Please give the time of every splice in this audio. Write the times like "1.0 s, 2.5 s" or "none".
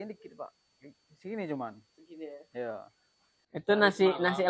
none